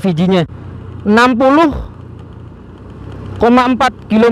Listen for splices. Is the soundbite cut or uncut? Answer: uncut